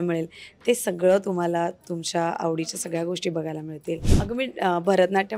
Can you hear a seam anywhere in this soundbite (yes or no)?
yes